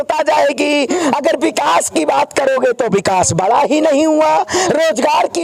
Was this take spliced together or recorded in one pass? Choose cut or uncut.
uncut